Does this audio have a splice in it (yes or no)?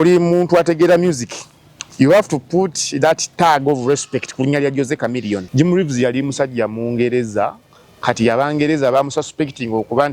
yes